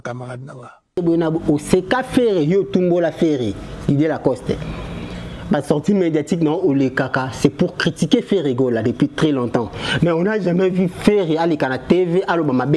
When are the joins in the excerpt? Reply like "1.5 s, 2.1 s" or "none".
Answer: 1.0 s